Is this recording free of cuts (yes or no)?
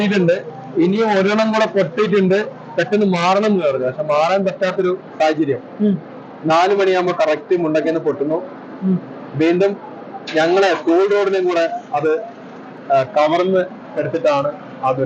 yes